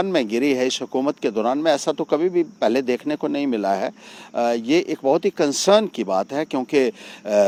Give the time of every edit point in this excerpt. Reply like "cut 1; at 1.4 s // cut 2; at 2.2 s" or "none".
none

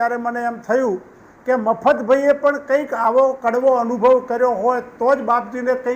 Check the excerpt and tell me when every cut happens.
none

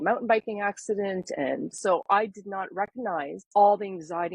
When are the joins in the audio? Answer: cut 1; at 1.8 s // cut 2; at 3.4 s

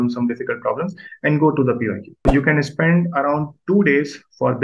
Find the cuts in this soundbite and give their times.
cut 1; at 2.3 s

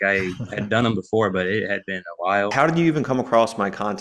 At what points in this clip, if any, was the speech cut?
cut 1; at 2.5 s

